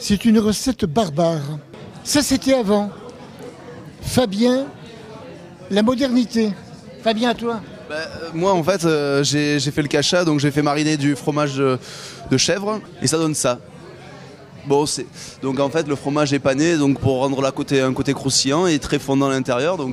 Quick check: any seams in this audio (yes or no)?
yes